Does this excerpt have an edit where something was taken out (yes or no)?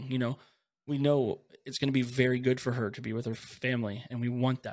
no